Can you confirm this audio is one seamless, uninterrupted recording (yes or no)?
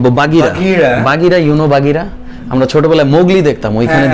yes